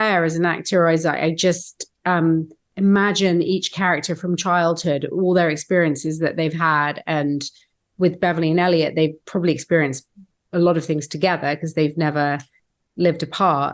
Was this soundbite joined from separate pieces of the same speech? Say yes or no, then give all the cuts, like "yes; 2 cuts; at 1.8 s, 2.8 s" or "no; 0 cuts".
yes; 1 cut; at 2.6 s